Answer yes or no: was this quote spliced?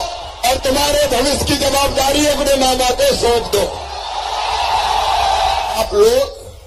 no